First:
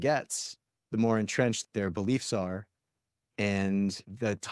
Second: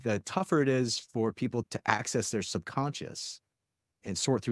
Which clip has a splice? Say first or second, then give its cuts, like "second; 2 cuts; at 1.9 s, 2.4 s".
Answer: second; 1 cut; at 1.7 s